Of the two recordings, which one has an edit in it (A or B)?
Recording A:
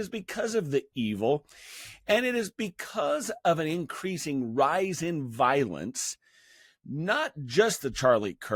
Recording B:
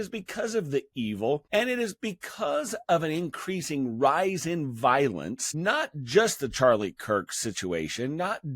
B